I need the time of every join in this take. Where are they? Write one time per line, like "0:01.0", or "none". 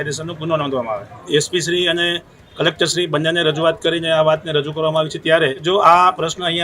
0:01.1
0:05.6